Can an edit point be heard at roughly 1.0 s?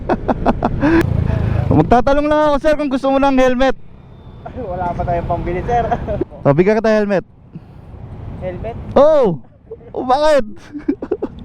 yes; 2 cuts; at 1.0 s, 6.2 s

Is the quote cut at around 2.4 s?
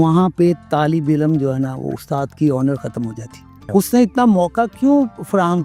no; 1 cut; at 3.6 s

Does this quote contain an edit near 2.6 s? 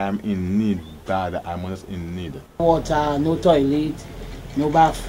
yes; 1 cut; at 2.6 s

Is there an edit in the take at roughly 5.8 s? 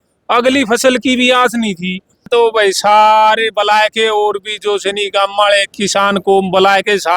no; 1 cut; at 2.3 s

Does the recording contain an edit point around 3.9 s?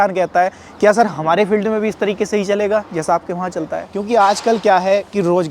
yes; 1 cut; at 3.9 s

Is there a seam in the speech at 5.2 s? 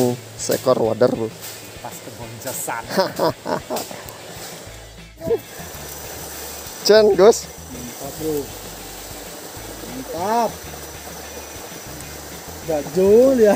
yes; 1 cut; at 5.2 s

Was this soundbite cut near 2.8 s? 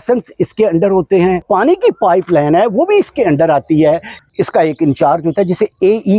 no; 2 cuts; at 1.4 s, 4.1 s

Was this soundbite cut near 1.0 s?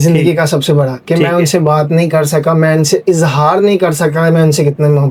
no; 0 cuts

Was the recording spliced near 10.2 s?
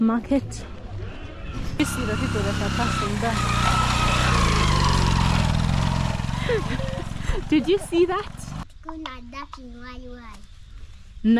no; 2 cuts; at 1.8 s, 8.7 s

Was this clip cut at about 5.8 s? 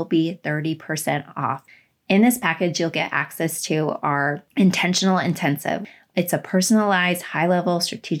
yes; 3 cuts; at 1.7 s, 4.4 s, 5.8 s

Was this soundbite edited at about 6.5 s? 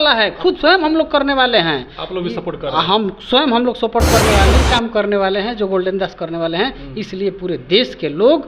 no; 1 cut; at 4.6 s

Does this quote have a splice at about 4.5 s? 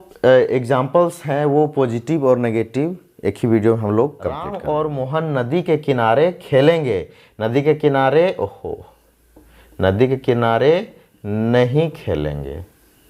yes; 1 cut; at 4.5 s

